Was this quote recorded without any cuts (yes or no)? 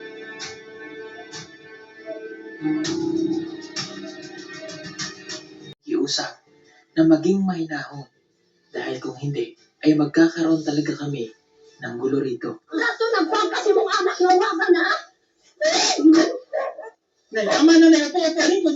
no